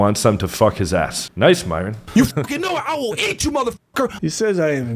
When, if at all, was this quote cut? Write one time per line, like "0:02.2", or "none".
0:01.2
0:02.0

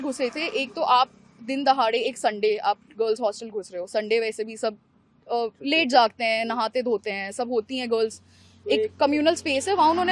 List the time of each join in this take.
none

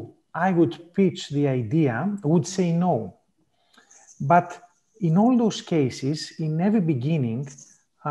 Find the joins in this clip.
none

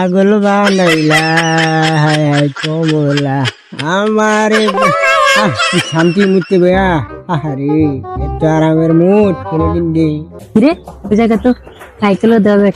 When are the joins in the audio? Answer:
0:10.3

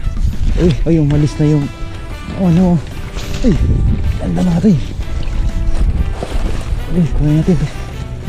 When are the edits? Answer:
none

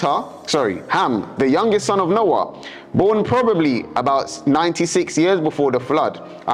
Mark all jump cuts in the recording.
none

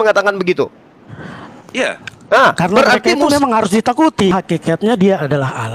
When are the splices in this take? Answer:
0:04.3

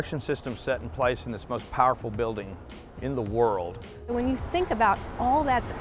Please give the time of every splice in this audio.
0:04.0

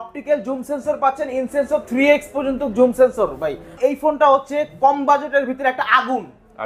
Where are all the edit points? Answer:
0:03.7

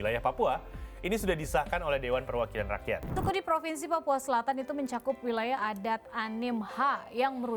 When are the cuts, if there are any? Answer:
0:03.2

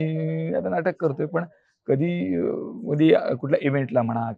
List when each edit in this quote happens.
none

